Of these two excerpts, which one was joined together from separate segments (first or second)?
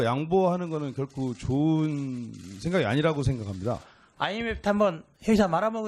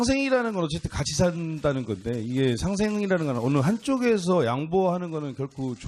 first